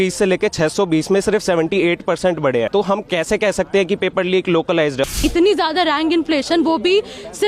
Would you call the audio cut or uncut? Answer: cut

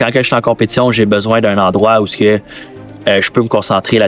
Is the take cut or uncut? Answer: uncut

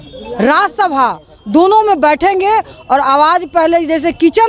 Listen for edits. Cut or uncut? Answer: uncut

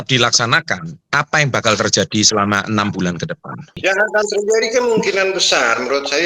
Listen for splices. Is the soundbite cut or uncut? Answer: cut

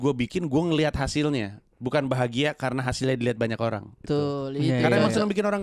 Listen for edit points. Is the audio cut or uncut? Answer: cut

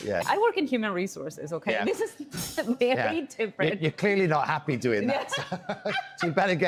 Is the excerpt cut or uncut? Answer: uncut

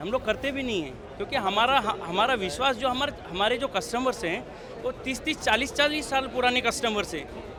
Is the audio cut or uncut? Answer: uncut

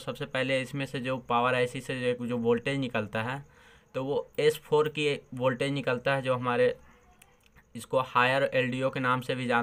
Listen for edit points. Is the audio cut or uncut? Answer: uncut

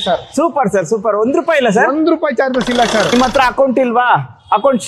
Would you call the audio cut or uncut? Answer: cut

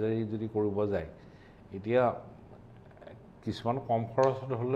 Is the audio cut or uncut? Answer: uncut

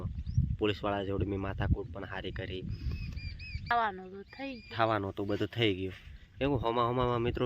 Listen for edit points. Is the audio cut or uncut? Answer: cut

